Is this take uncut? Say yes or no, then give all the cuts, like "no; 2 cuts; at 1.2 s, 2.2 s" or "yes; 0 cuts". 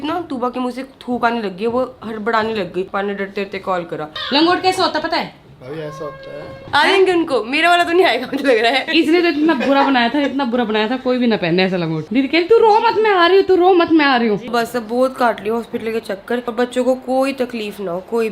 no; 7 cuts; at 2.9 s, 4.1 s, 6.6 s, 8.9 s, 12.0 s, 14.5 s, 16.5 s